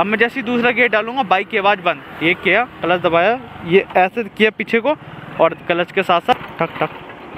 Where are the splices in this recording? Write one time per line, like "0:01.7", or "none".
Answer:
0:06.3